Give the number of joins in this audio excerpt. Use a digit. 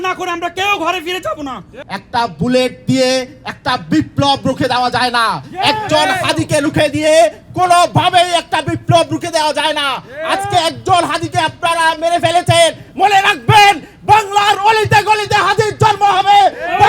1